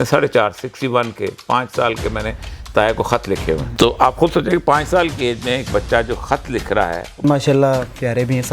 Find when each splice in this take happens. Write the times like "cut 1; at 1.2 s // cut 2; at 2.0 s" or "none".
cut 1; at 3.7 s // cut 2; at 7.2 s

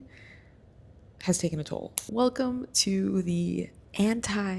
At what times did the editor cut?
cut 1; at 2.0 s

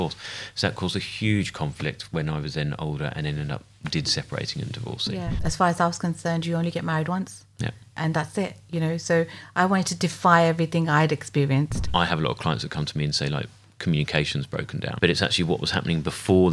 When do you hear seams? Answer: cut 1; at 5.4 s // cut 2; at 11.9 s // cut 3; at 14.9 s

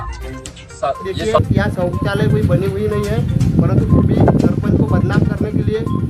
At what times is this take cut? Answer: cut 1; at 1.4 s

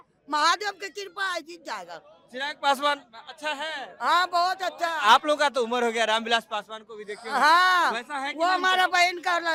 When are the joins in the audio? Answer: none

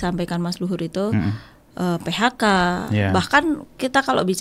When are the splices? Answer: none

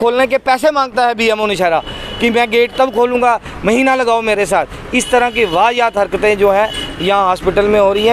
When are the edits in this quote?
none

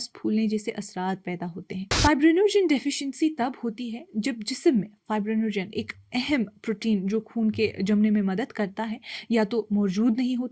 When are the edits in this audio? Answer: cut 1; at 1.9 s

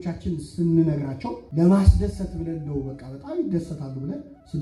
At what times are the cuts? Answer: cut 1; at 1.4 s

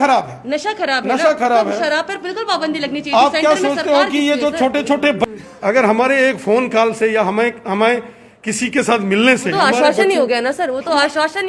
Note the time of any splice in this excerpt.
cut 1; at 5.2 s

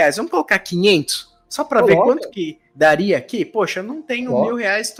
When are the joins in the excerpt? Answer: none

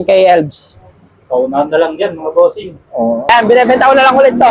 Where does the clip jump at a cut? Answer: cut 1; at 3.3 s

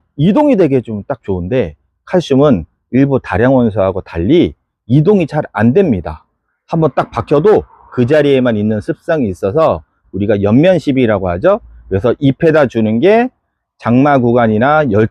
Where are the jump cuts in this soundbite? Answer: none

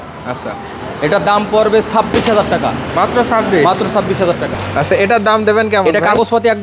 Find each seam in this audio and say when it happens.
cut 1; at 4.5 s

